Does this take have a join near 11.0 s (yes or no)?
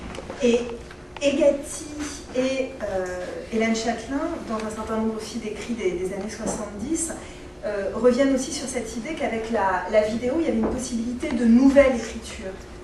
no